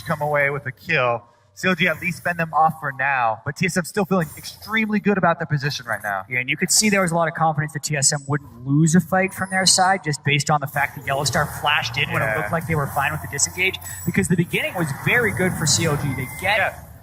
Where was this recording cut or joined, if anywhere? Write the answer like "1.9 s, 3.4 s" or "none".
3.7 s